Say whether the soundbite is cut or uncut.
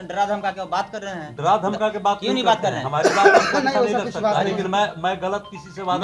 uncut